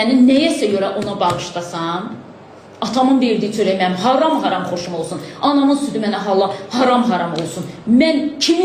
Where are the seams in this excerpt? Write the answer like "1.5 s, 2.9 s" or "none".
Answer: none